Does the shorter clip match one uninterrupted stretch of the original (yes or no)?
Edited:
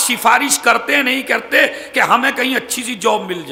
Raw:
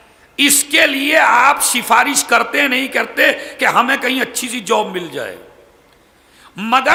yes